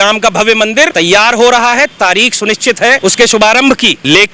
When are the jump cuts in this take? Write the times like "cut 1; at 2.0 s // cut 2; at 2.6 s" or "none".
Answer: cut 1; at 0.9 s // cut 2; at 3.0 s